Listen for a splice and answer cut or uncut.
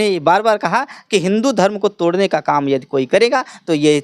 uncut